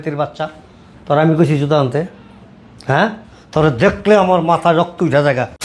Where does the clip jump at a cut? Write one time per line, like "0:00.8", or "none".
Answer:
none